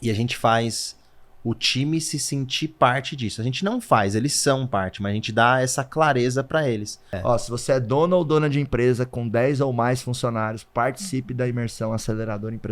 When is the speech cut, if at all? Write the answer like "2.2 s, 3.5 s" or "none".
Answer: 7.0 s

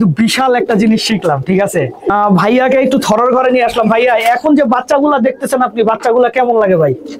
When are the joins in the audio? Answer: none

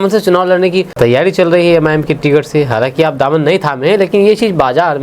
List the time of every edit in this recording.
0.9 s

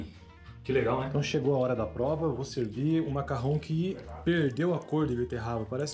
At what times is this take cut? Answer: 1.1 s

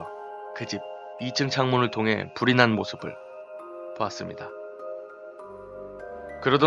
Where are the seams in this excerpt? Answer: 4.8 s

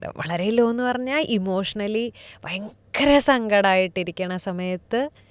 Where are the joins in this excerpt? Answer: none

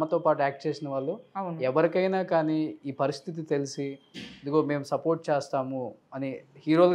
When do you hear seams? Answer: none

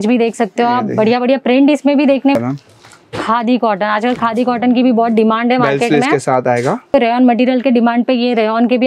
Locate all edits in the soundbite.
2.3 s, 6.9 s

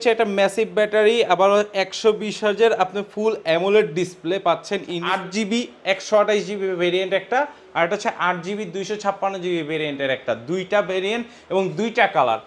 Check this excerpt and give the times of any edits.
5.0 s

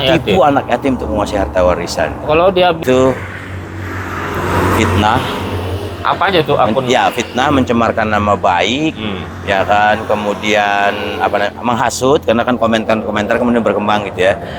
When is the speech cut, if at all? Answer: 2.8 s

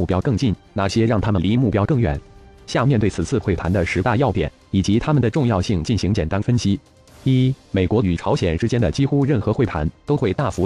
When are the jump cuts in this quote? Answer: 2.0 s

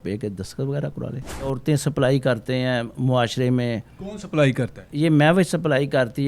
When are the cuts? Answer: 1.6 s

